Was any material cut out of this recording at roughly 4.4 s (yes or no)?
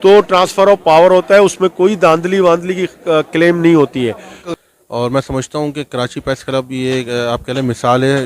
yes